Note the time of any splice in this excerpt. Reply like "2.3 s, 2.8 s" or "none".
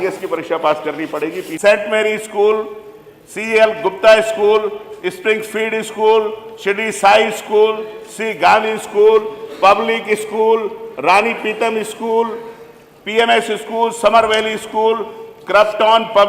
1.5 s